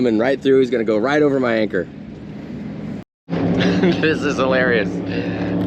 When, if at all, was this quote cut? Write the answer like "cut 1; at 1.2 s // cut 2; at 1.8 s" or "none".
cut 1; at 3.0 s